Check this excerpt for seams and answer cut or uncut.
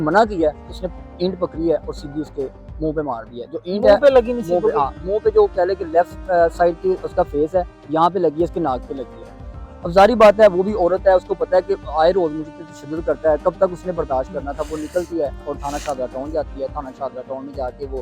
uncut